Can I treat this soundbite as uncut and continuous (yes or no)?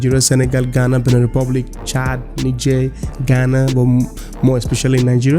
yes